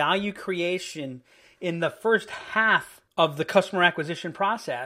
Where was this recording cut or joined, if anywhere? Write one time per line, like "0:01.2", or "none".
0:03.0